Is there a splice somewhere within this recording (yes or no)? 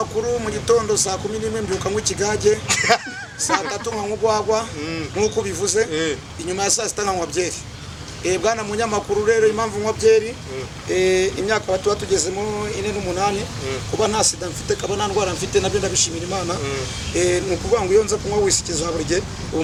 no